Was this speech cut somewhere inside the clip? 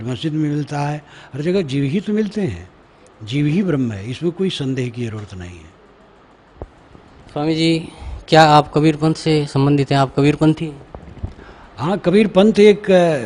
yes; 1 cut; at 6.4 s

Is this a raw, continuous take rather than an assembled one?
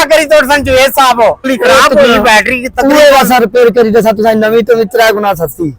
no; 1 cut; at 1.5 s

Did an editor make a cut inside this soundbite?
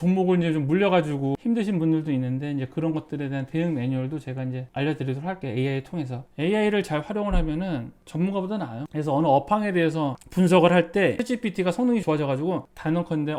no; 0 cuts

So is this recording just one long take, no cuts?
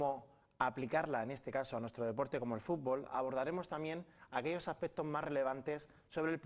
yes; 0 cuts

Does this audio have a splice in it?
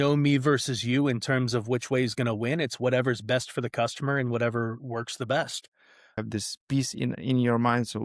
yes; 1 cut; at 6.1 s

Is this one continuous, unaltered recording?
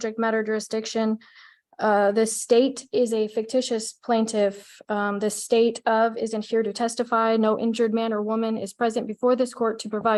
yes; 0 cuts

